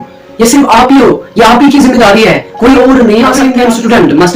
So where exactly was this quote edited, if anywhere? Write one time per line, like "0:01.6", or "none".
0:03.4